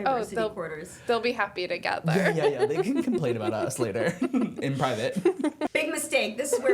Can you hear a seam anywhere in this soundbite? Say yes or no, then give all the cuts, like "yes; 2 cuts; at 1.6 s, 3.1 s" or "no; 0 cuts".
yes; 1 cut; at 5.7 s